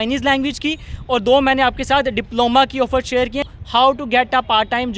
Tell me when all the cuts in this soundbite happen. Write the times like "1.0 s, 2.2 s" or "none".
3.5 s

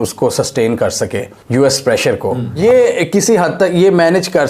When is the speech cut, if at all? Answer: 2.6 s

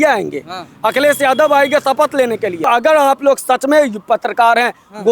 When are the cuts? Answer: 2.7 s

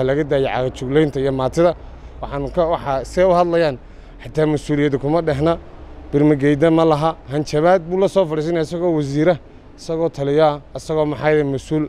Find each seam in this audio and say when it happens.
2.1 s

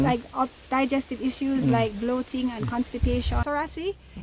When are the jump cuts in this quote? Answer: 3.3 s

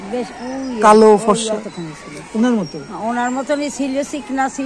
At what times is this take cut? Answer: none

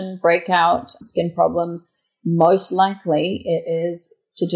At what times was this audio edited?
1.0 s

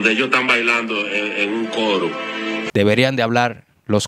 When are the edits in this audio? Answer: 2.6 s

